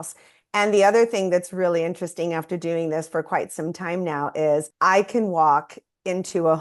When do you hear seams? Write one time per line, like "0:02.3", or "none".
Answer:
0:04.7